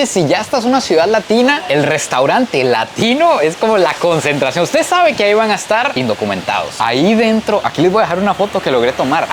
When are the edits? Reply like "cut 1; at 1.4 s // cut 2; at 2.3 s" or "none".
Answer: cut 1; at 6.8 s